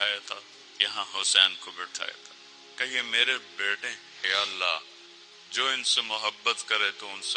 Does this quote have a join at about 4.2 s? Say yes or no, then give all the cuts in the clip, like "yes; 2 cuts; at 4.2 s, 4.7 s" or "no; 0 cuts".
yes; 1 cut; at 4.2 s